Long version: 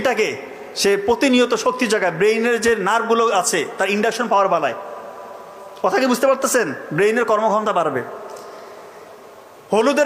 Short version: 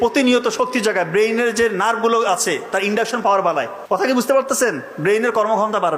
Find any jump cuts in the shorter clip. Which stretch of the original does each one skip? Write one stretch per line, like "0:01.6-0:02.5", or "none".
0:05.0-0:05.9